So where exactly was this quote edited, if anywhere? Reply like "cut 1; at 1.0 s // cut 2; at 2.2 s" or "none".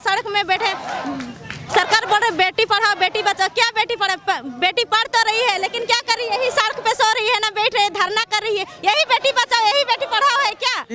none